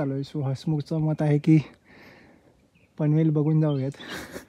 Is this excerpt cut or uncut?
uncut